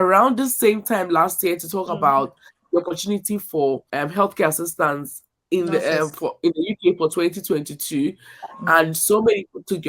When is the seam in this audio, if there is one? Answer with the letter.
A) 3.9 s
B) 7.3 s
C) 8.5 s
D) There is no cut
A